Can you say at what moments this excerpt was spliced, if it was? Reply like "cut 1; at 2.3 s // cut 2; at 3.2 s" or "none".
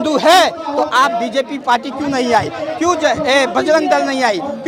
none